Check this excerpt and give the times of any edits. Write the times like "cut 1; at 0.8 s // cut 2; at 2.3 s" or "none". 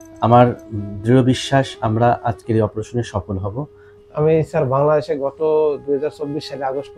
cut 1; at 4.0 s